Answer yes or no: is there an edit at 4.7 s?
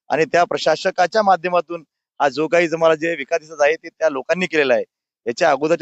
yes